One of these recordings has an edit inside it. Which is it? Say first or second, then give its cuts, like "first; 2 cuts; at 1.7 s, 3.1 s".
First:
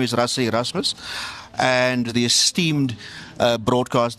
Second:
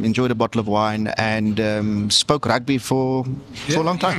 first; 1 cut; at 2.1 s